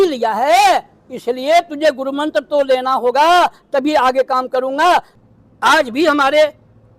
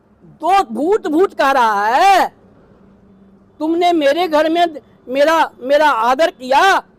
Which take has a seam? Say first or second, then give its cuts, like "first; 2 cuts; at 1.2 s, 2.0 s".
first; 1 cut; at 5.2 s